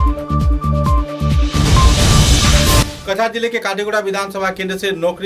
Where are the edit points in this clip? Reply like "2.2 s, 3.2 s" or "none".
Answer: 2.9 s